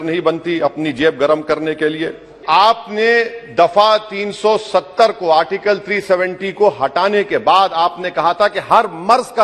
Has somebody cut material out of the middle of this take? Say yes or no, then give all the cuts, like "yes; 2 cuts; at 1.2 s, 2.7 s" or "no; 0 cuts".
yes; 1 cut; at 2.4 s